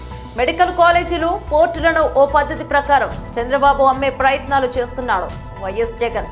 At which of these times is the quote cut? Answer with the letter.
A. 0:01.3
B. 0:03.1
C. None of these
C